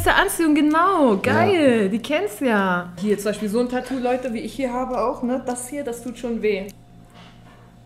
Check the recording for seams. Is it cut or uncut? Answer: cut